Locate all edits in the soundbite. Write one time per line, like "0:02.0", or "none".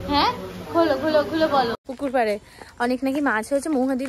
0:01.8